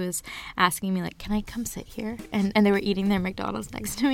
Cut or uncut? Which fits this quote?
uncut